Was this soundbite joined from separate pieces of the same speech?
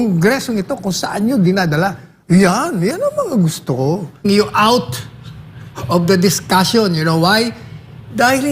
yes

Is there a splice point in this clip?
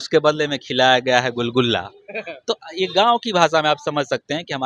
no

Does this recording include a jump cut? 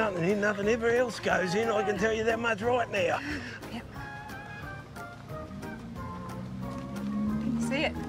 no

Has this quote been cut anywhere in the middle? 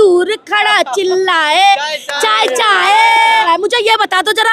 yes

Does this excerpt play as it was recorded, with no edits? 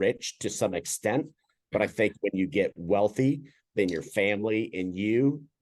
yes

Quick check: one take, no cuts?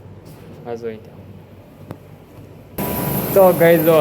no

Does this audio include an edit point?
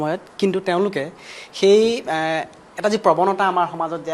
no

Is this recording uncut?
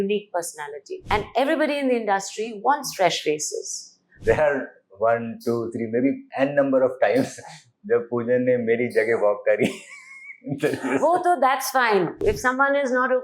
no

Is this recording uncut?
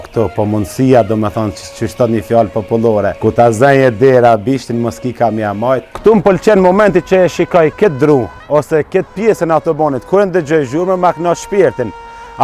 no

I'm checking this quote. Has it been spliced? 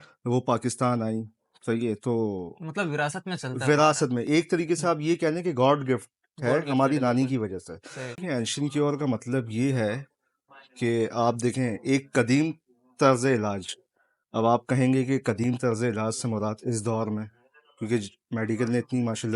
yes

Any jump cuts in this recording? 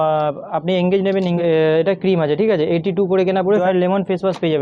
yes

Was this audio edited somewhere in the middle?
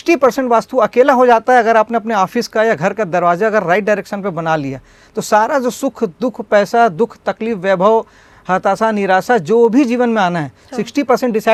no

